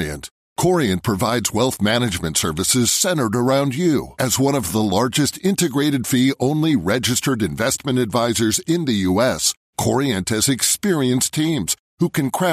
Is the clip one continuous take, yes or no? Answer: yes